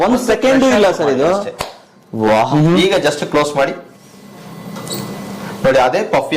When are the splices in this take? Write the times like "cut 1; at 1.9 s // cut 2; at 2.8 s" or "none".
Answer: cut 1; at 2.4 s